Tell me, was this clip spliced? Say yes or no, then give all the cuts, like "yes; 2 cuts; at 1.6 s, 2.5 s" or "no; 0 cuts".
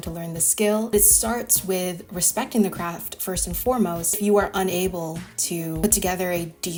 no; 0 cuts